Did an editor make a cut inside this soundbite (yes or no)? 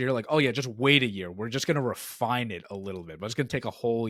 no